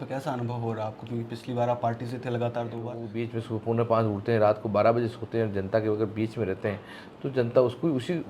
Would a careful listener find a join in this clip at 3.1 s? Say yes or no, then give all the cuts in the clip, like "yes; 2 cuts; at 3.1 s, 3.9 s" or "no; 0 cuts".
yes; 1 cut; at 3.1 s